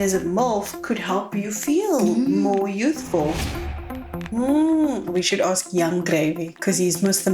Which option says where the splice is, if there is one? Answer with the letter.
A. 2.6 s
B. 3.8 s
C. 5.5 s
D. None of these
B